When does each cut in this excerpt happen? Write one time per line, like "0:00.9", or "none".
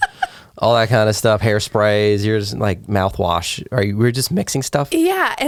none